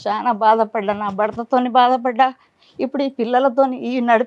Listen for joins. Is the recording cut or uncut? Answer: uncut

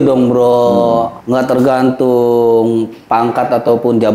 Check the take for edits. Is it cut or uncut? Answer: cut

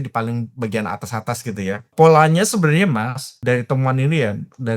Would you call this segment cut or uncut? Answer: cut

